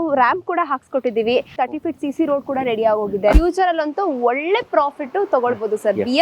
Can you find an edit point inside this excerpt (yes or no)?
yes